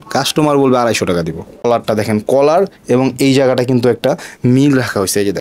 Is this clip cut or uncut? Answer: cut